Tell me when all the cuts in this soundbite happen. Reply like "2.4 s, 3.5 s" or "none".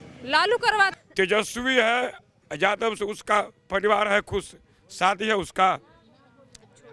0.9 s